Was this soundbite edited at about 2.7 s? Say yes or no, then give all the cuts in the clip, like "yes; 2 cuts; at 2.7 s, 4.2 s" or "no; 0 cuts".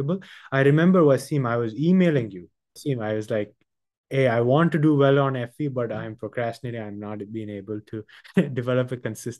yes; 1 cut; at 2.7 s